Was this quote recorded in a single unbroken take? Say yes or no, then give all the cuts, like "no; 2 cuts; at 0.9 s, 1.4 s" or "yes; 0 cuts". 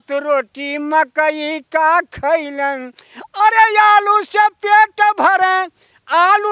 yes; 0 cuts